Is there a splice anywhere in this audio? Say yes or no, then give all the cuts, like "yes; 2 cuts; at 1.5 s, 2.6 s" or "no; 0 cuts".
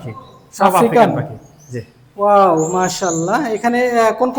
no; 0 cuts